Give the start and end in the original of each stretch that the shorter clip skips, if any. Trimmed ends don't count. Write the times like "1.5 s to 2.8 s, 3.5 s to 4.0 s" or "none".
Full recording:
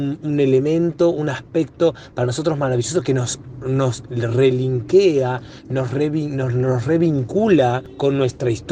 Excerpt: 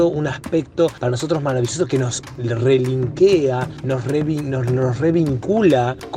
2.0 s to 2.1 s, 3.5 s to 4.0 s, 5.5 s to 5.6 s